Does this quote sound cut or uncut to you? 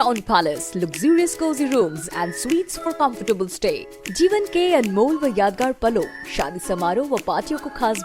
uncut